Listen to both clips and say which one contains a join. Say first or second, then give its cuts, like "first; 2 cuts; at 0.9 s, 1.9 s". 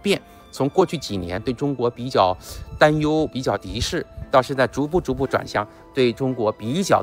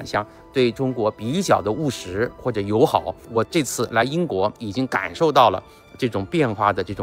second; 1 cut; at 3.3 s